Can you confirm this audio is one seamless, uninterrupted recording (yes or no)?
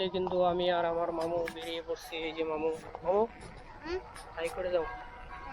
yes